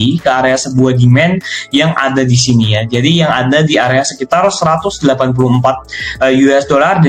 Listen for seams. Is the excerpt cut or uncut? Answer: uncut